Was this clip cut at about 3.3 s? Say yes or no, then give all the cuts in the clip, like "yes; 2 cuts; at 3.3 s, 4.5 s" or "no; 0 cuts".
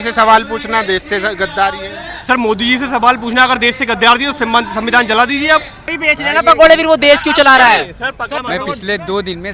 no; 2 cuts; at 6.0 s, 8.4 s